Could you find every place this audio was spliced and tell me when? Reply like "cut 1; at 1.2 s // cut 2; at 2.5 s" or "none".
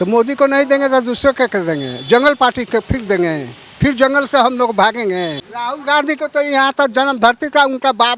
cut 1; at 5.5 s